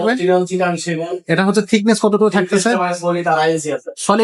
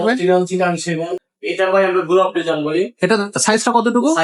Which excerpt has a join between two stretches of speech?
second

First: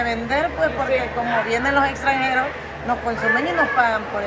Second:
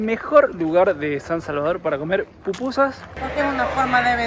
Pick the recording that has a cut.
second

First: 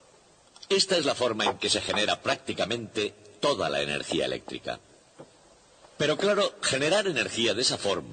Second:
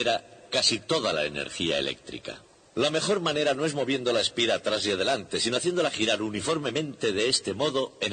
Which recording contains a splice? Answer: second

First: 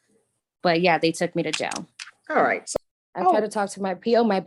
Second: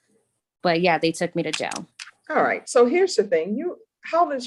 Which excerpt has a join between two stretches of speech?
first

